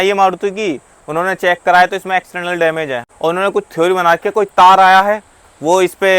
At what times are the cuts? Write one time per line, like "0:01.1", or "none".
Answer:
0:03.1